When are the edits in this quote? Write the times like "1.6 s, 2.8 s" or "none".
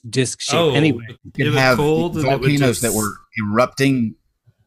1.4 s